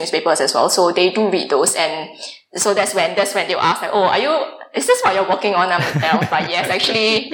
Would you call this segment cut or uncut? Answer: uncut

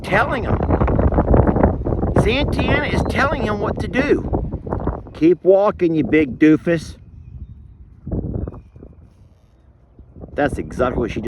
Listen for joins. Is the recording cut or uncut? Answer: cut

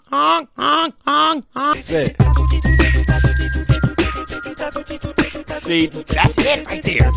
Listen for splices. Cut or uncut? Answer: uncut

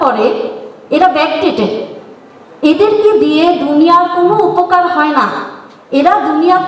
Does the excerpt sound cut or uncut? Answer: uncut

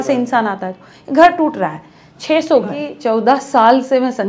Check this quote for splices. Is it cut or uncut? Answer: cut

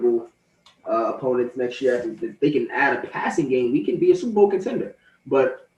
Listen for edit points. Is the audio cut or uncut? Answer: uncut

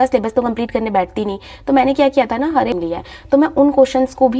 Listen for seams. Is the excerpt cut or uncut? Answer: cut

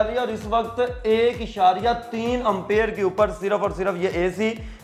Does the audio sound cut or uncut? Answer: uncut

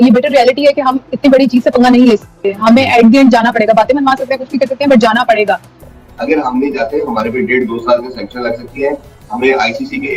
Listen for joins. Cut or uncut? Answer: cut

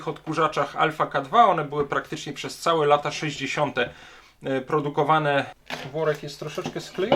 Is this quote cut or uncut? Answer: cut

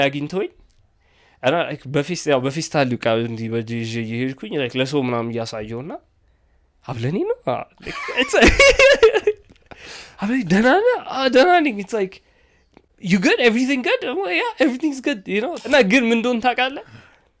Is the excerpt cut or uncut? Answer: cut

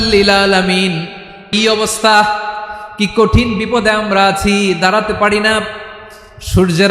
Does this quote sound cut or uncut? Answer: cut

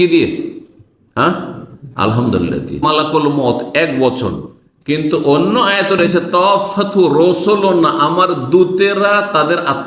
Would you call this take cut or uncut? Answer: cut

